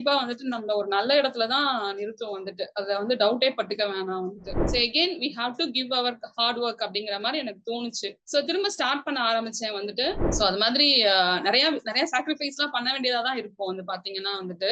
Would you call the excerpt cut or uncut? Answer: cut